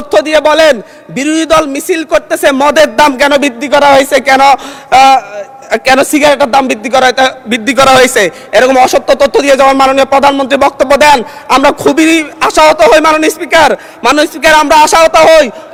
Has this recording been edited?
no; 0 cuts

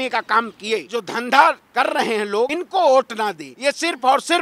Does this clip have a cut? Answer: yes; 3 cuts; at 0.9 s, 2.6 s, 3.5 s

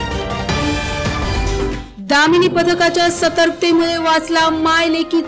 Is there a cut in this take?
no; 0 cuts

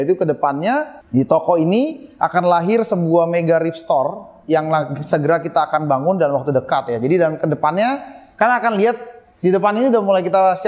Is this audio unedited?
yes; 0 cuts

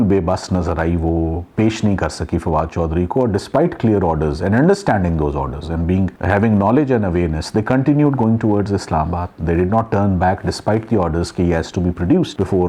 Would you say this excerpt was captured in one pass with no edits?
yes; 0 cuts

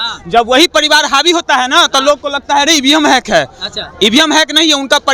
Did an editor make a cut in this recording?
no; 0 cuts

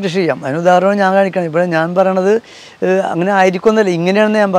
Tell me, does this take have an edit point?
no; 0 cuts

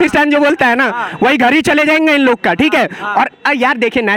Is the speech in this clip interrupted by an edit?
no; 0 cuts

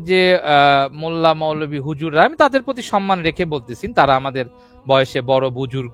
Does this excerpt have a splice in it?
no; 0 cuts

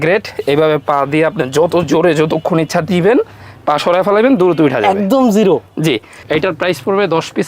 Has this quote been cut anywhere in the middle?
yes; 1 cut; at 6.2 s

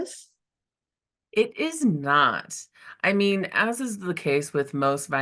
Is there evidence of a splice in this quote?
no; 0 cuts

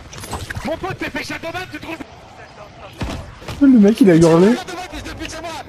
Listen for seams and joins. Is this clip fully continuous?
yes; 0 cuts

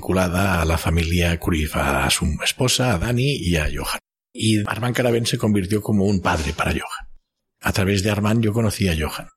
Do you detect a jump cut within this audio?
yes; 2 cuts; at 4.7 s, 7.6 s

